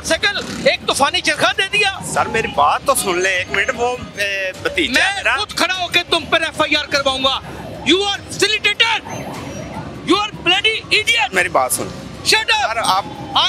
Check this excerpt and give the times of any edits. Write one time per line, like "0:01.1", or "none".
none